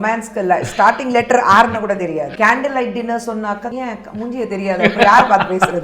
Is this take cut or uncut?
cut